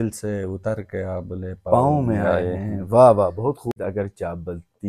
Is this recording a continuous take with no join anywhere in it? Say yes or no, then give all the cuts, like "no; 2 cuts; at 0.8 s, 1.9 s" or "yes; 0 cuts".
no; 1 cut; at 3.8 s